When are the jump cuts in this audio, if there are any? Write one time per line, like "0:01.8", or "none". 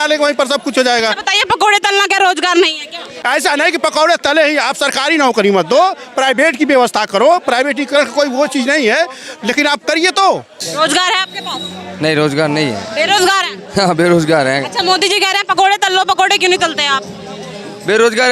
0:03.1
0:10.5